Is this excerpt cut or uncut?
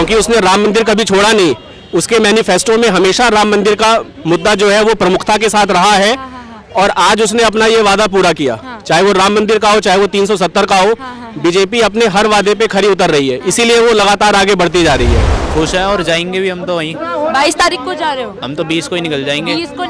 cut